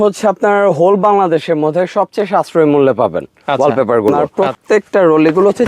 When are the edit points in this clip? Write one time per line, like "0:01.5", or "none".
0:04.2